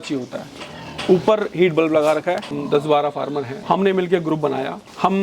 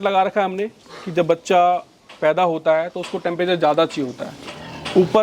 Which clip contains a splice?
first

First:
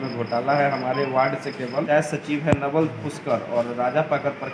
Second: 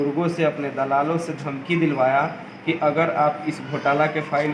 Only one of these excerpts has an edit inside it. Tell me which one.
first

